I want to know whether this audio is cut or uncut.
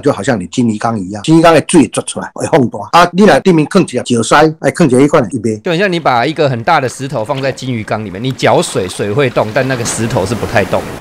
cut